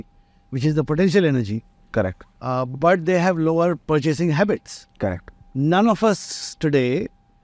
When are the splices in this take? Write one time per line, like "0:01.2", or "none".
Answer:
0:03.8

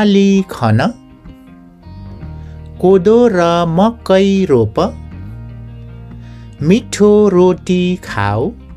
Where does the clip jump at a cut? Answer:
0:01.0
0:02.4

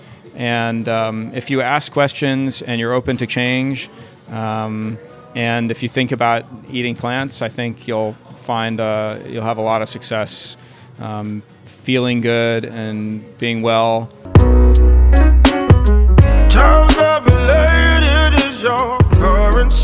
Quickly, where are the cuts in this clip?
0:14.2

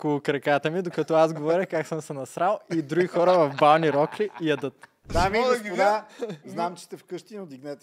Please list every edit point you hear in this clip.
0:05.1

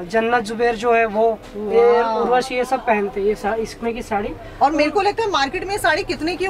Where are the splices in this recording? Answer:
none

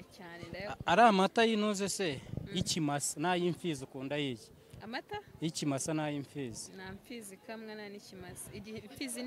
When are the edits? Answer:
none

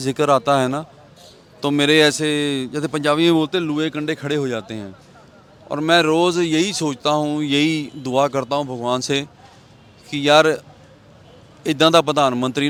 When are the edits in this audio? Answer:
none

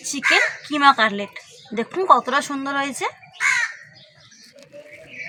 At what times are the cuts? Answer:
none

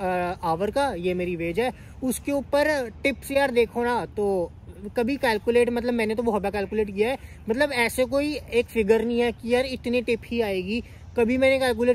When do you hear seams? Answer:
none

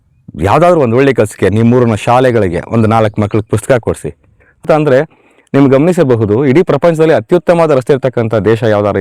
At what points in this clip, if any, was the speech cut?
0:04.6

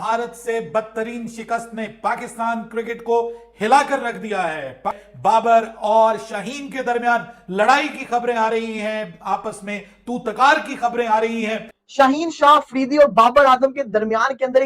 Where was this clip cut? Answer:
0:05.1
0:11.8

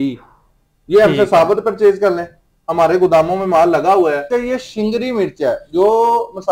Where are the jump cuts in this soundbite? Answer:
0:04.2

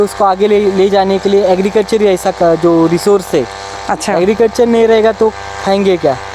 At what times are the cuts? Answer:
none

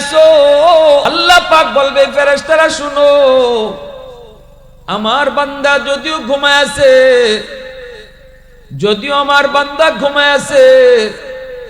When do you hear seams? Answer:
0:01.1

